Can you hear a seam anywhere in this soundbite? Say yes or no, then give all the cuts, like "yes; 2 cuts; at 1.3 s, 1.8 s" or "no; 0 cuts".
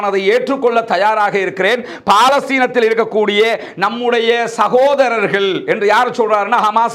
no; 0 cuts